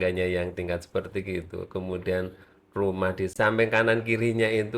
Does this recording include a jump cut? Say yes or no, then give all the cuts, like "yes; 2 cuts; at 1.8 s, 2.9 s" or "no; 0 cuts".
yes; 1 cut; at 3.3 s